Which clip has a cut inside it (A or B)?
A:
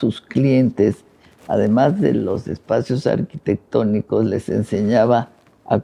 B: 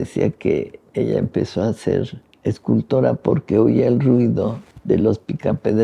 B